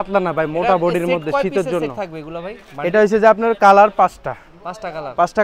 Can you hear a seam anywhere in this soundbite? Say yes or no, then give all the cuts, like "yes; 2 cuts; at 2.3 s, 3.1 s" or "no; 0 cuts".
no; 0 cuts